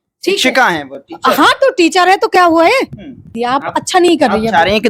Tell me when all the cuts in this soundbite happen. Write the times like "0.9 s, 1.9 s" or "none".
3.3 s